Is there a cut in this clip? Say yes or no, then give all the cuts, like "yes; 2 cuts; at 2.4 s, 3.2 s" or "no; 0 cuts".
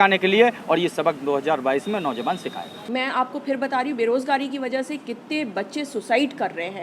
yes; 1 cut; at 2.7 s